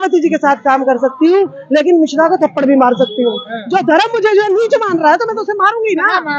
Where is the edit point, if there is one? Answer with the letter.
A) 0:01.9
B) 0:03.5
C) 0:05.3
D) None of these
B